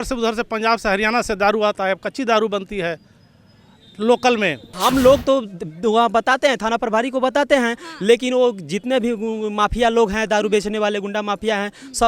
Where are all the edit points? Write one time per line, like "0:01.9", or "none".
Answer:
0:04.7